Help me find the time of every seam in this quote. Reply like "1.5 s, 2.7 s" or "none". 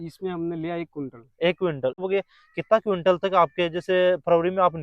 2.0 s